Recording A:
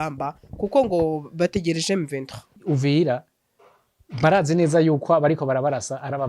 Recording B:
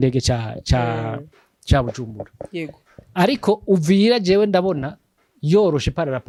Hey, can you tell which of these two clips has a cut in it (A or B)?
A